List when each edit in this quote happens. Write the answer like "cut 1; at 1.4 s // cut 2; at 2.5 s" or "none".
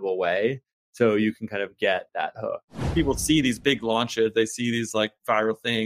cut 1; at 2.8 s